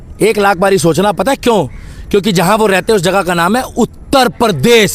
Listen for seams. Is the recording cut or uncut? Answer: uncut